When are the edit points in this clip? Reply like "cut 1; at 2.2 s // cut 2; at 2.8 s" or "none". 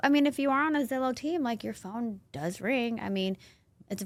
none